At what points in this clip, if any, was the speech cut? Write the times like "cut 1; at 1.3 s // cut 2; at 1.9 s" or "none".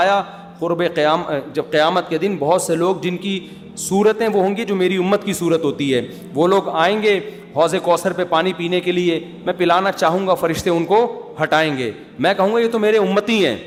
none

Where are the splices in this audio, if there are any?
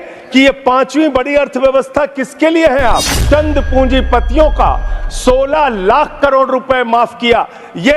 cut 1; at 3.2 s

